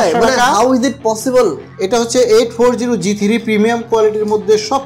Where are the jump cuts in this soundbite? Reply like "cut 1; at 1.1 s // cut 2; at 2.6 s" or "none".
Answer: cut 1; at 1.7 s